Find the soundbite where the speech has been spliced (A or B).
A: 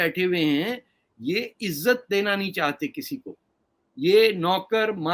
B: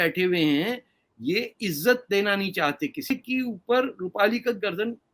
B